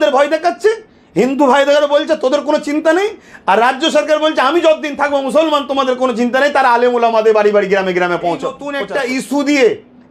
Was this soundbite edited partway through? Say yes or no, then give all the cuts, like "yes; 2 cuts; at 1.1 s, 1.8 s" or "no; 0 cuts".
yes; 1 cut; at 8.7 s